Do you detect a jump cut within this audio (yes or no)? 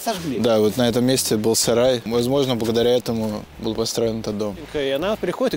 yes